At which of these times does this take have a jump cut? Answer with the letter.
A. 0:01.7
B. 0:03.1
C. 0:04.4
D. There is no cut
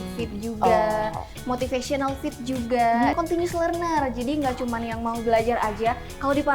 B